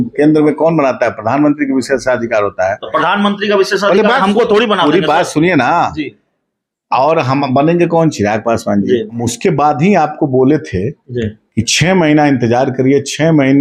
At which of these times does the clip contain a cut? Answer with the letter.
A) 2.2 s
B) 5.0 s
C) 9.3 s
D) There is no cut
C